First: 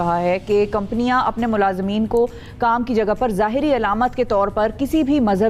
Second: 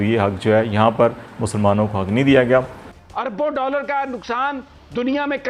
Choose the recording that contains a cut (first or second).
second